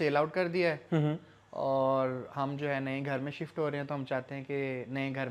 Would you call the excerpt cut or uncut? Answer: uncut